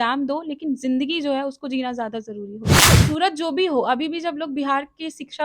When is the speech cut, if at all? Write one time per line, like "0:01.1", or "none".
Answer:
0:02.8